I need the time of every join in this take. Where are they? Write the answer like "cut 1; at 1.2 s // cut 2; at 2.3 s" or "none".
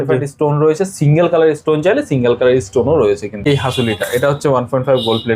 cut 1; at 3.5 s